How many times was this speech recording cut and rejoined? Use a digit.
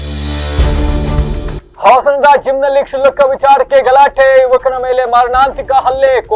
1